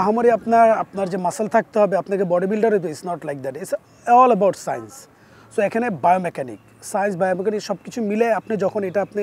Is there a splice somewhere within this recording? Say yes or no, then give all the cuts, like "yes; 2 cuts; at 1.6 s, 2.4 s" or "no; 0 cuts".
no; 0 cuts